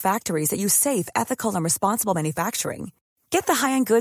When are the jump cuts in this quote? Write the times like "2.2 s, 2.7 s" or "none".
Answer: none